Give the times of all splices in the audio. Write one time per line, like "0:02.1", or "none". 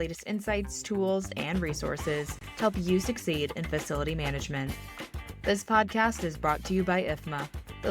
none